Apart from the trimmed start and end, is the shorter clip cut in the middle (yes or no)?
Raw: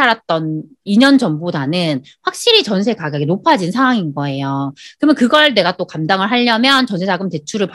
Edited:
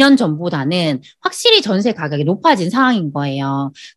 no